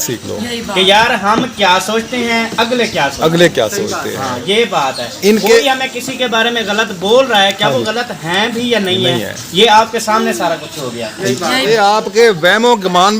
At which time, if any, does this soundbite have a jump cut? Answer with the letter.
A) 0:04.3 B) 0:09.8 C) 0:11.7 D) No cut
C